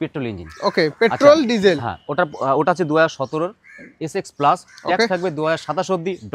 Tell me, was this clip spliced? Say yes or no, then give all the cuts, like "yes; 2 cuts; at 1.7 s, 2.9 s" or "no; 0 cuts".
no; 0 cuts